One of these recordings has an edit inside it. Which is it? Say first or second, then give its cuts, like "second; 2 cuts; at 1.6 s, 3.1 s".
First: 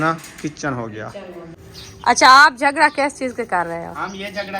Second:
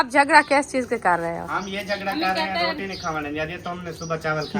first; 1 cut; at 1.5 s